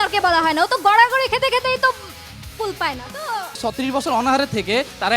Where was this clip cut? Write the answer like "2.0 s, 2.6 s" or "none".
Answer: 3.6 s